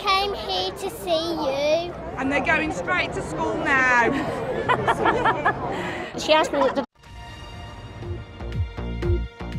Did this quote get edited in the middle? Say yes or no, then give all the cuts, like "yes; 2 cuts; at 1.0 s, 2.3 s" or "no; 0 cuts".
no; 0 cuts